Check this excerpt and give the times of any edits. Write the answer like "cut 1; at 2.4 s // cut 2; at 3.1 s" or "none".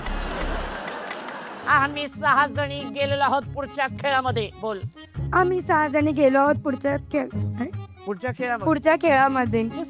cut 1; at 1.5 s

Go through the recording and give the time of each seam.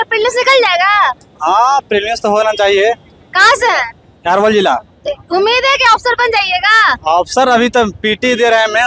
none

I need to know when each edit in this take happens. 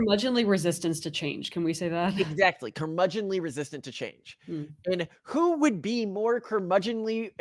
none

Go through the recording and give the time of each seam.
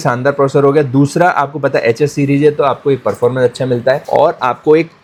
none

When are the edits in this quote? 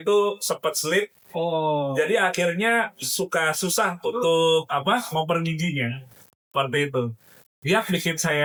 none

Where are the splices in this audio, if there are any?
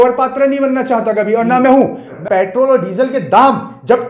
cut 1; at 2.1 s

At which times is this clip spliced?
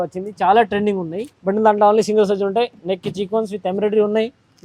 cut 1; at 1.2 s

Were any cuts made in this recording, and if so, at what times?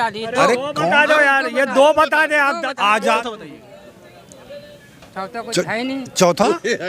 cut 1; at 3.2 s

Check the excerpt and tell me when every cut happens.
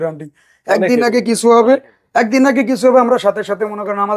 none

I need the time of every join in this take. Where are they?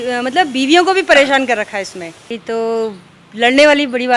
cut 1; at 2.3 s

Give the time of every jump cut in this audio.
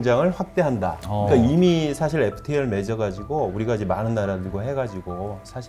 none

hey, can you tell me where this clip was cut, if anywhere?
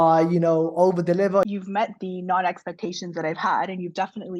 cut 1; at 1.5 s

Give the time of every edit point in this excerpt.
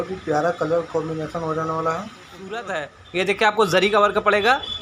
cut 1; at 2.7 s

